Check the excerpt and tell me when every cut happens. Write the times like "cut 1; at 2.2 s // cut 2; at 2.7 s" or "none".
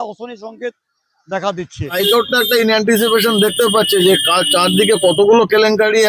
cut 1; at 2.0 s